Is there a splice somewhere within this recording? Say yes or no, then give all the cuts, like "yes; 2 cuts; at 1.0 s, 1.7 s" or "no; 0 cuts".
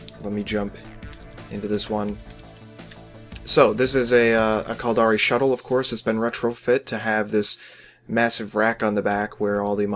no; 0 cuts